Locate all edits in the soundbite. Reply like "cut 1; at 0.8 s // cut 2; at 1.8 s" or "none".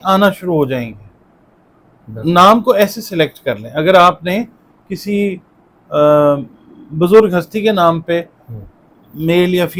none